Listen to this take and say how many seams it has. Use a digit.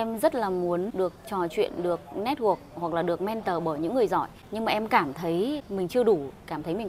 3